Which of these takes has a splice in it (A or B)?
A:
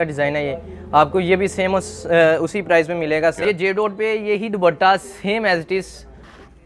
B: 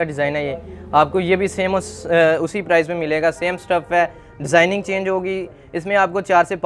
A